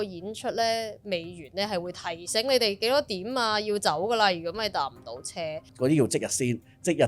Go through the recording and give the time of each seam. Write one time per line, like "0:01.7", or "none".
0:05.6